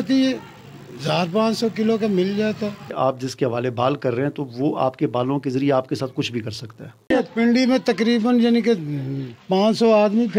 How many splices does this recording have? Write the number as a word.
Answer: two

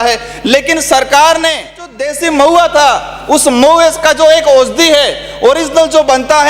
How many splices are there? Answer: one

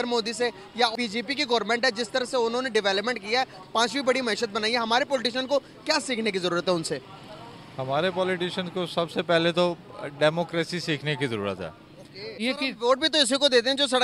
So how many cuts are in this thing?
two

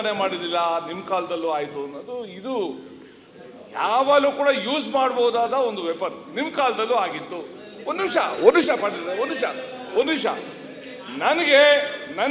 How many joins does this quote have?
zero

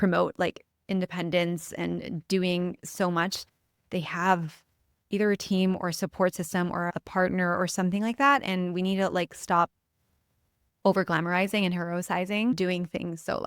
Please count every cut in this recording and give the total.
two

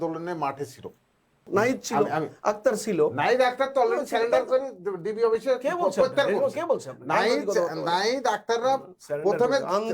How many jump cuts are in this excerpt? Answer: one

